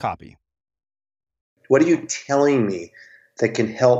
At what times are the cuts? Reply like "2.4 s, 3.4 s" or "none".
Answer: 1.6 s